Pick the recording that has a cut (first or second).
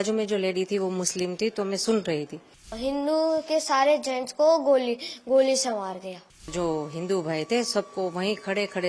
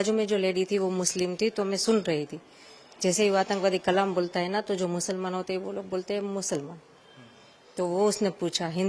first